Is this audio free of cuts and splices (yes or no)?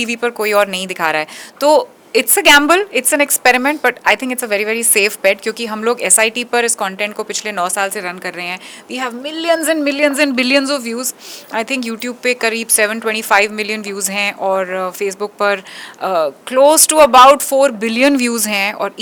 yes